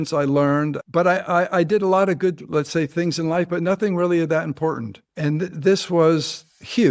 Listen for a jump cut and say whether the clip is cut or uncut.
uncut